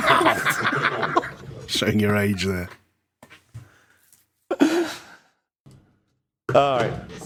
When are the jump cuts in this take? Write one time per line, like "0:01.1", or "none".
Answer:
none